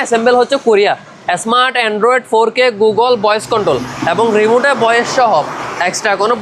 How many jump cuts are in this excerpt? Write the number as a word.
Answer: zero